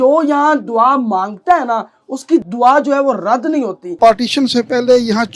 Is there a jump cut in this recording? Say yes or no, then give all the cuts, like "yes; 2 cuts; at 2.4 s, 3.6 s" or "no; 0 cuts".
yes; 1 cut; at 4.0 s